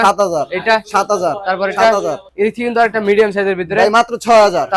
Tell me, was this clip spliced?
yes; 1 cut; at 2.2 s

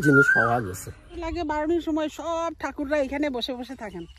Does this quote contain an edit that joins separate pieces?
yes; 1 cut; at 1.1 s

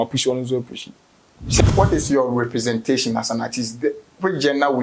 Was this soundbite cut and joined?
yes; 1 cut; at 1.6 s

